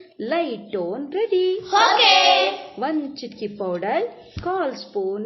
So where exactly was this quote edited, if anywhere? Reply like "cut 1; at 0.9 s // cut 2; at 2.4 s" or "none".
cut 1; at 3.5 s

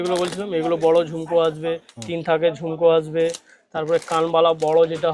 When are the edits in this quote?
none

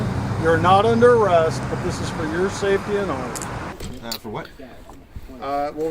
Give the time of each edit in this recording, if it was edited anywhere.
cut 1; at 3.7 s

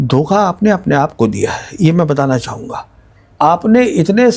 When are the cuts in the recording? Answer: cut 1; at 3.2 s

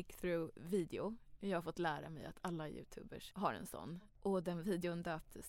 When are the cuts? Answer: cut 1; at 3.2 s // cut 2; at 3.9 s

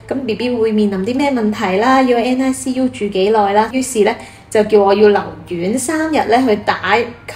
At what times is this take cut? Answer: cut 1; at 3.7 s

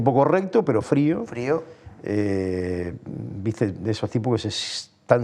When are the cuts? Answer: none

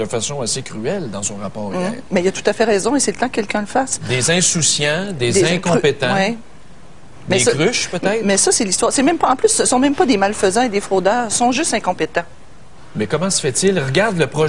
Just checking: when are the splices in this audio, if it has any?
cut 1; at 2.0 s

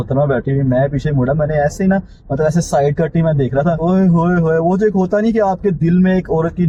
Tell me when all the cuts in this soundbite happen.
none

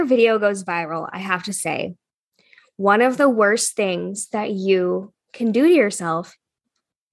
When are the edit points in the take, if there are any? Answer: none

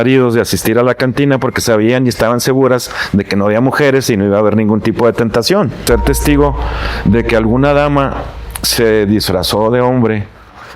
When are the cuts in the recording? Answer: cut 1; at 5.8 s

